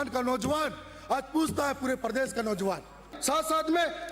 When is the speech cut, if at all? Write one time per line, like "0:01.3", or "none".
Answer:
0:03.1